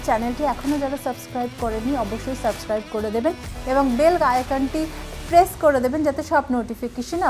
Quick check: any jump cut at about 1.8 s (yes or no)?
no